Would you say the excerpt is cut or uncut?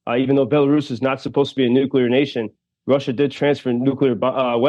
uncut